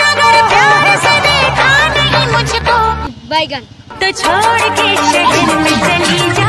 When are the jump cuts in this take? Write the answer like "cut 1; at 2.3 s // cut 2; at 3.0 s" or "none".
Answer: none